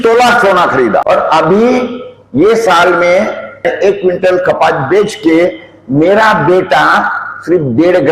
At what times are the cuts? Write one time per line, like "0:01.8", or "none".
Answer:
0:01.0
0:03.7